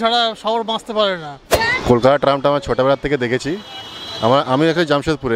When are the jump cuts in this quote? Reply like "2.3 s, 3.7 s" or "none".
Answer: 1.5 s